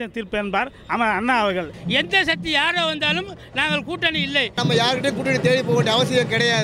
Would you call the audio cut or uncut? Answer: cut